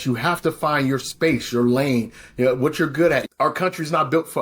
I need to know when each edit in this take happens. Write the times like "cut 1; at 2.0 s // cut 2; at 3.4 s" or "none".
cut 1; at 3.2 s